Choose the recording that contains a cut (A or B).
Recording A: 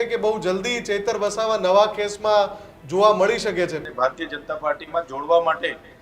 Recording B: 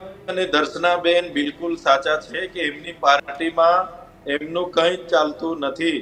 A